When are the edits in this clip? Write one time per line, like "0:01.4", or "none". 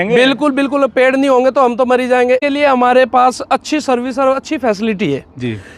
0:02.4